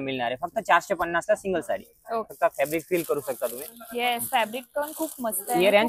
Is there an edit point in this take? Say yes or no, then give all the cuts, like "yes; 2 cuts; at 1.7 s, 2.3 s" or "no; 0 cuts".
yes; 1 cut; at 2.3 s